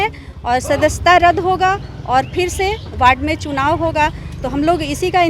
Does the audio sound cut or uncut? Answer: uncut